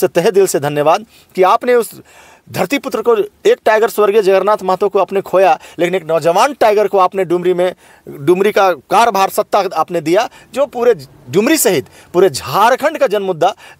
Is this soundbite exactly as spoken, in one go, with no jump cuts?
yes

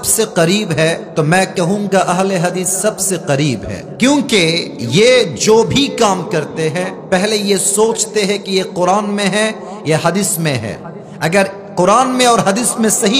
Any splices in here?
yes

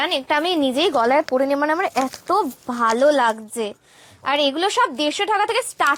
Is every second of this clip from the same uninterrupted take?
yes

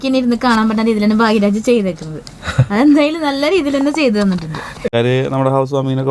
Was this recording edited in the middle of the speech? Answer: yes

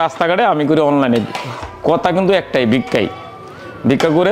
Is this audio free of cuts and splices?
yes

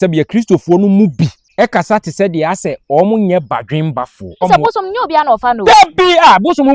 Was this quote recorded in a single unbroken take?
no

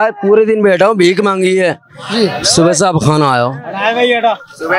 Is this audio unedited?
yes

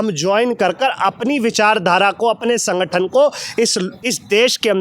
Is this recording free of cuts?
yes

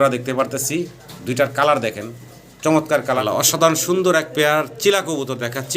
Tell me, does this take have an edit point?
yes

